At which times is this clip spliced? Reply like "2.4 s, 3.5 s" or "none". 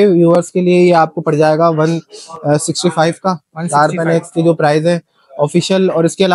none